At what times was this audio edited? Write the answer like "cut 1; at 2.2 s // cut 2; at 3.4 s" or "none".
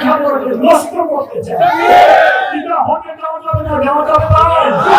none